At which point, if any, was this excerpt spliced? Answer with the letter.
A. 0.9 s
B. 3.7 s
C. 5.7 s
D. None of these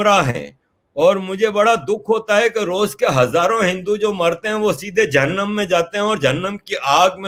D